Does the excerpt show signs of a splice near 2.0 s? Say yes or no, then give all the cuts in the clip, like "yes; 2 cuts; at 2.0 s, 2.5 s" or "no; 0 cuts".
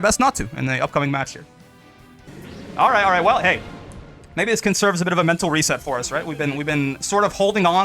yes; 1 cut; at 2.0 s